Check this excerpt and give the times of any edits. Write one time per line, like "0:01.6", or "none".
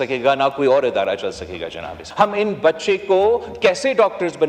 0:02.0